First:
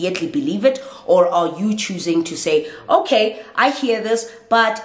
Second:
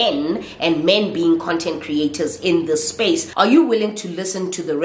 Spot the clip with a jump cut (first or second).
second